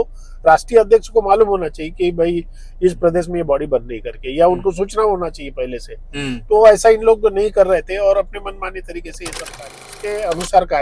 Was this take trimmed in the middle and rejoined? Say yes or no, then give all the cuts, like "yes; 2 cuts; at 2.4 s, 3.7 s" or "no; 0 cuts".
yes; 1 cut; at 9.8 s